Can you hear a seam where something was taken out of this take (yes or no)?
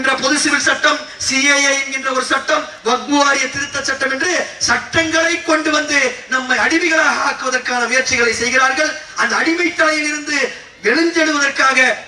no